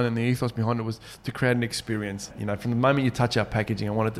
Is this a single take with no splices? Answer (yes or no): no